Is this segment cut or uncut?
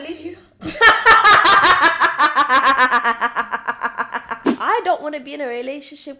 cut